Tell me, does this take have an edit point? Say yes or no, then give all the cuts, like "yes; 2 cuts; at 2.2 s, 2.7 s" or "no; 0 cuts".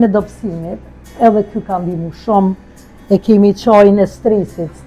no; 0 cuts